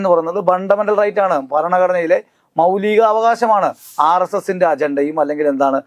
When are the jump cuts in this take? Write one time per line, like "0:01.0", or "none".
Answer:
0:03.8